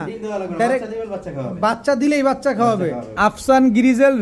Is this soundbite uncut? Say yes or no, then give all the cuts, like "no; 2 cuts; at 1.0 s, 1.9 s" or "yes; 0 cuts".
no; 1 cut; at 3.1 s